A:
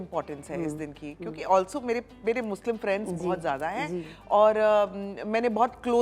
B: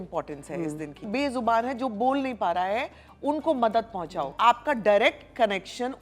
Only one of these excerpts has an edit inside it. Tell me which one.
B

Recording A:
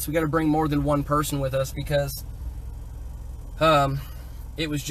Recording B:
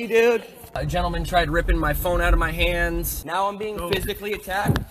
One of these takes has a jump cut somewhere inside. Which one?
B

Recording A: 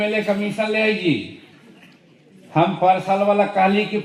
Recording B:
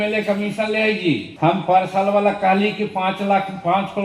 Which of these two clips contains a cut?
B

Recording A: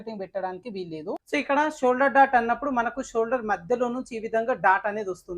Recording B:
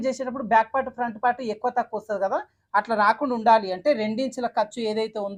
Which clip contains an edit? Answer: A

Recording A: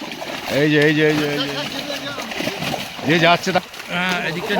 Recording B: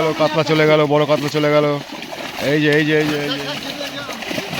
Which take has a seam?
A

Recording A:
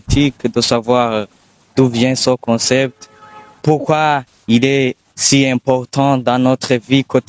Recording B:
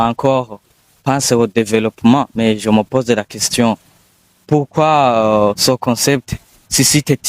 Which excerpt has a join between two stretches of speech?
A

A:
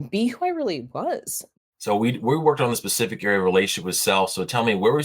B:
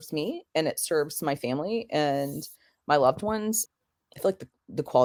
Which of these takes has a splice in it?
A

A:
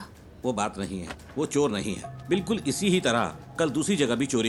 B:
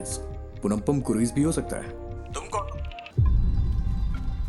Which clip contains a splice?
B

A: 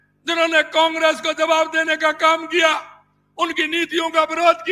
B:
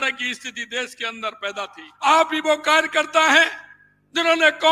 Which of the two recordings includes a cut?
B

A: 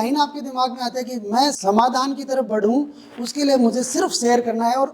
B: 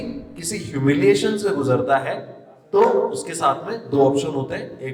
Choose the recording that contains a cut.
A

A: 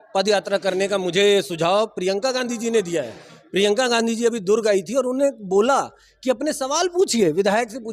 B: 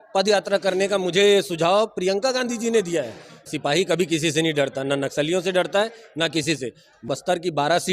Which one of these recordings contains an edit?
B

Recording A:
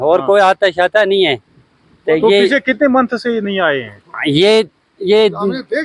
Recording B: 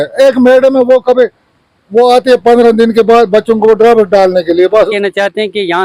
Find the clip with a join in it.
B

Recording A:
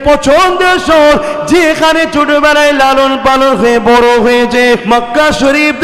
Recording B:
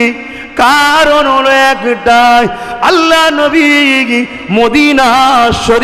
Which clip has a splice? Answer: A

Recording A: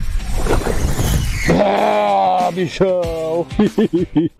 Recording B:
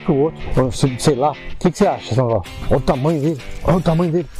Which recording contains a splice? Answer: B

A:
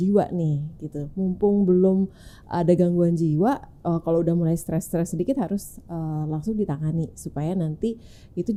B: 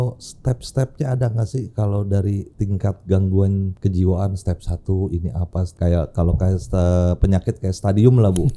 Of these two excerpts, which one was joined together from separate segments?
B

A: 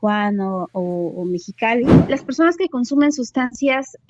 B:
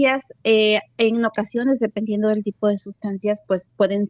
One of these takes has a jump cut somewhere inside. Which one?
A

